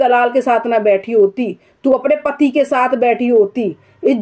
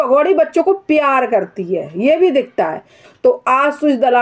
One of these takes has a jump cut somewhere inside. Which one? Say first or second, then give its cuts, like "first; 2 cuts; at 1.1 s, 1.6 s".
second; 1 cut; at 3.0 s